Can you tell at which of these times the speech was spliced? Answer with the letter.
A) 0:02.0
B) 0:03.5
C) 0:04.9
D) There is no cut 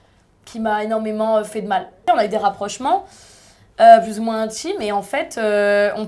A